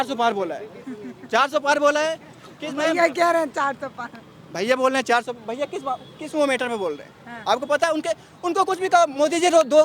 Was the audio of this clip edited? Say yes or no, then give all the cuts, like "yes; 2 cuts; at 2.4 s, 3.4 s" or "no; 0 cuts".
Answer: no; 0 cuts